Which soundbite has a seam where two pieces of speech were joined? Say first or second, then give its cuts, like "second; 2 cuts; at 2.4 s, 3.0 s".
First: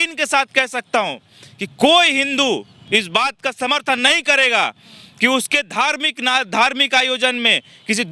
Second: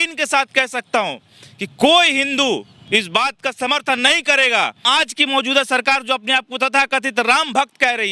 second; 1 cut; at 4.8 s